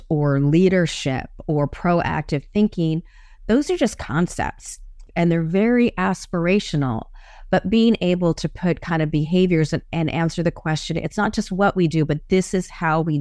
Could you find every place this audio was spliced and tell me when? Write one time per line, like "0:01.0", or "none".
0:05.0

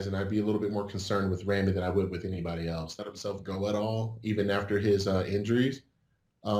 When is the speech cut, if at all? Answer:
0:02.9

